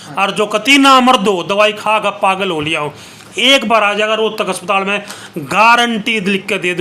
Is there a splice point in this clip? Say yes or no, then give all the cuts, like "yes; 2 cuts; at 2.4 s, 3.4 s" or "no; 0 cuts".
no; 0 cuts